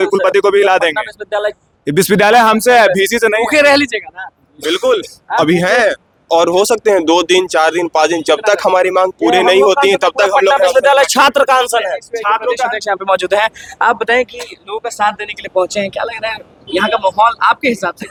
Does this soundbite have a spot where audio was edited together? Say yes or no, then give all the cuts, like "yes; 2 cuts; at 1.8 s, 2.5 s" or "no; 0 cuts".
no; 0 cuts